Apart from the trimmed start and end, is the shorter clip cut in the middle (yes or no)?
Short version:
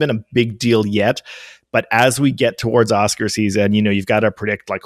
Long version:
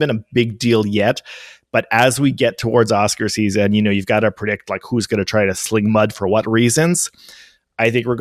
no